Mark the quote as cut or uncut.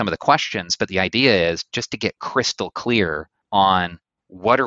cut